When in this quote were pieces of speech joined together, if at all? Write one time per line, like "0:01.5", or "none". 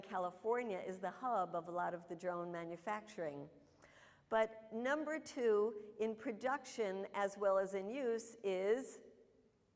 0:05.0